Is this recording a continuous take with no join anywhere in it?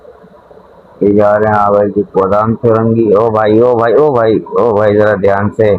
yes; 0 cuts

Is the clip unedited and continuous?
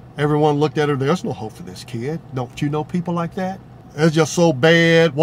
no; 1 cut; at 3.8 s

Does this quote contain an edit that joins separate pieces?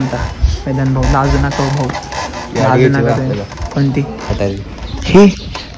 no; 0 cuts

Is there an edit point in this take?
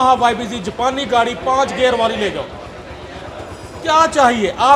no; 0 cuts

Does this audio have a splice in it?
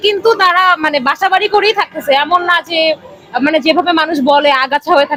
no; 0 cuts

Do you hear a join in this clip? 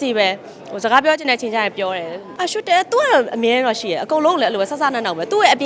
yes; 1 cut; at 2.2 s

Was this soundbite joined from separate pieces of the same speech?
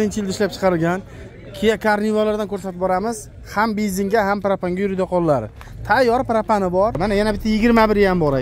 yes; 1 cut; at 7.0 s

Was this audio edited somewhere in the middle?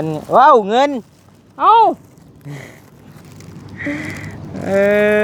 no; 0 cuts

